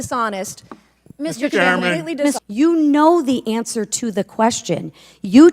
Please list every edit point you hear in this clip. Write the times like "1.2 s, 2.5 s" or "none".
2.4 s